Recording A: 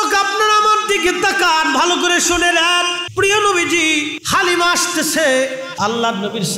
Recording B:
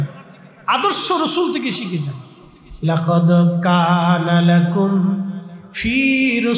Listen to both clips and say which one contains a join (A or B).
A